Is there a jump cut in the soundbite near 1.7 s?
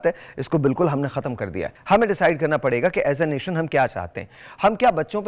yes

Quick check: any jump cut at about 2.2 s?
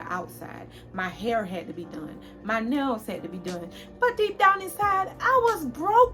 no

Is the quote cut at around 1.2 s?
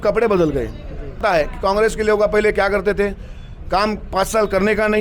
yes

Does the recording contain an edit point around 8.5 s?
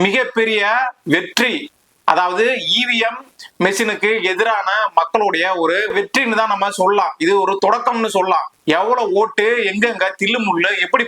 yes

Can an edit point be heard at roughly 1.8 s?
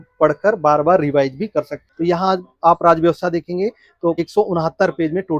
yes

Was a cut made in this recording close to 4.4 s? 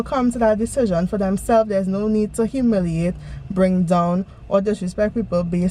no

